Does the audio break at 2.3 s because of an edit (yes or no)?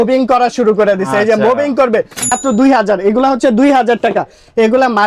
yes